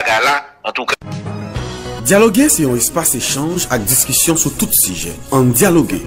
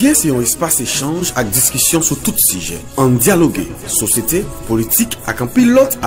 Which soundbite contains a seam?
first; 1 cut; at 0.9 s

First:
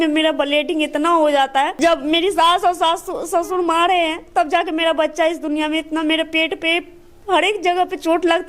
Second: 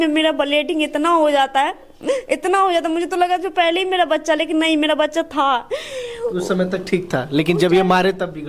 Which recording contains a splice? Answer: first; 1 cut; at 1.7 s

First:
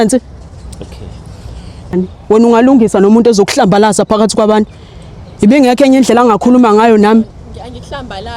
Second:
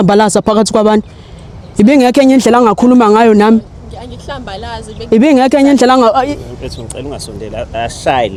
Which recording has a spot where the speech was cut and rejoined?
first; 1 cut; at 1.9 s

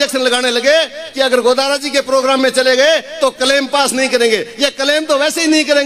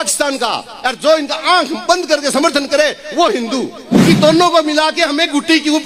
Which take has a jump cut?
second; 1 cut; at 3.9 s

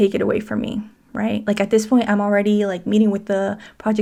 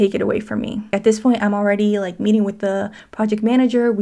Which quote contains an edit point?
second; 1 cut; at 0.9 s

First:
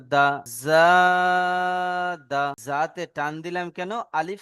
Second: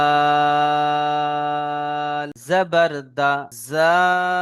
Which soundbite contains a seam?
first; 1 cut; at 2.6 s

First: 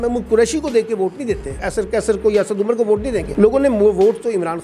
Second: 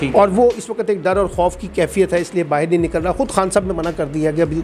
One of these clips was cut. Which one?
first; 2 cuts; at 1.6 s, 3.3 s

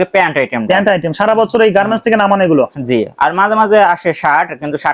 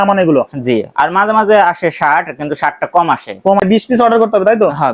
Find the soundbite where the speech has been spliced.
second; 1 cut; at 3.6 s

